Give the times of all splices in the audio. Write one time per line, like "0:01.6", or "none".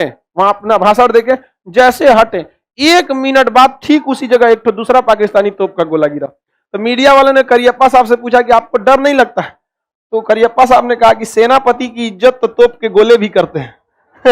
0:06.6